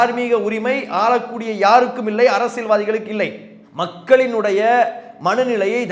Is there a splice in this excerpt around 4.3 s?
no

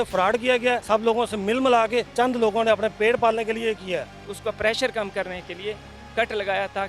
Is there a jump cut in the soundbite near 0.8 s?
yes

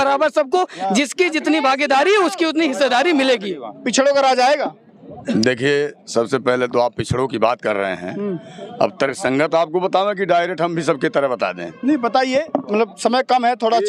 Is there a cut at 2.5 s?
no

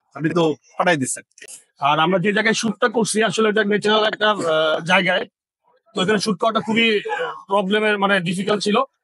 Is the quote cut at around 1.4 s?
yes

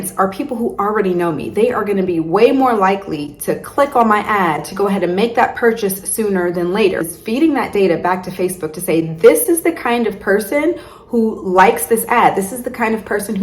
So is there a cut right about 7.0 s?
yes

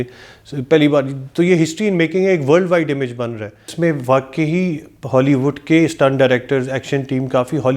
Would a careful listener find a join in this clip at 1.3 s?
no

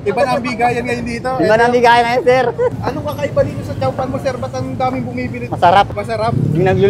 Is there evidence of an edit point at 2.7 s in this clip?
yes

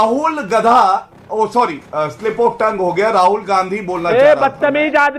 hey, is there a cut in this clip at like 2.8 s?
no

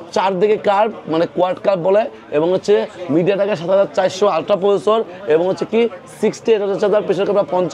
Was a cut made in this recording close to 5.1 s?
no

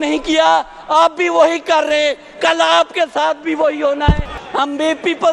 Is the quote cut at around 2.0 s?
no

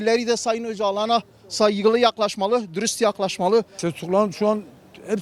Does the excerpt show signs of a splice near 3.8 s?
yes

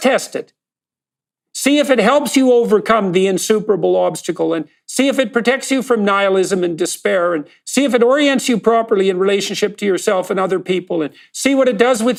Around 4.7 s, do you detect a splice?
no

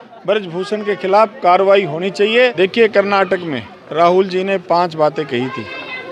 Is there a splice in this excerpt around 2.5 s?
yes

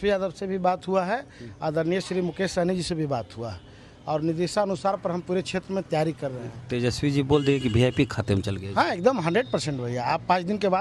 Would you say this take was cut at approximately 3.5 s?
no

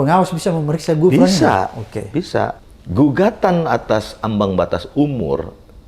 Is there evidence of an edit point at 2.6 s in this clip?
yes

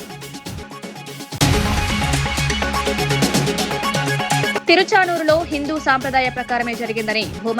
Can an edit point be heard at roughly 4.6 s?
yes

